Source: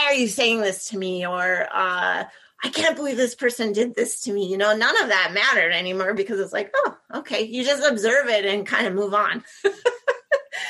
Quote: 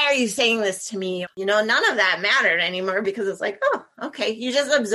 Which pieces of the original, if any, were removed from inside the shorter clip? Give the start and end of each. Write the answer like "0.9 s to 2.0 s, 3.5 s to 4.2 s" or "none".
1.3 s to 4.5 s